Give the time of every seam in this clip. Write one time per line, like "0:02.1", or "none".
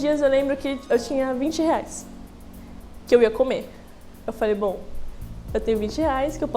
none